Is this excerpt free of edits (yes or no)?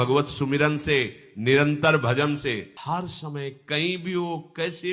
no